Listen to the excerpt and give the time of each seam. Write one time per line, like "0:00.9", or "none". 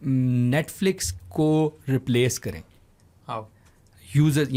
none